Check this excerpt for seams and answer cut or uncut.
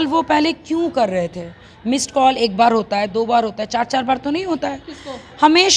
uncut